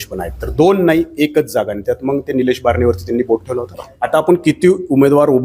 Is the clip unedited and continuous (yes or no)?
no